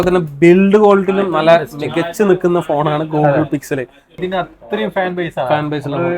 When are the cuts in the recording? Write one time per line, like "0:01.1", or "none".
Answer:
0:04.1